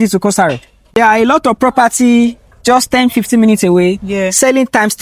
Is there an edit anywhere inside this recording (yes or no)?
yes